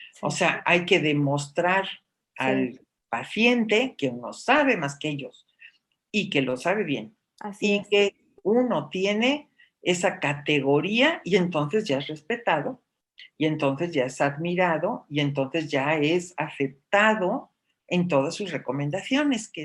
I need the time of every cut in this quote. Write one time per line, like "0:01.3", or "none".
none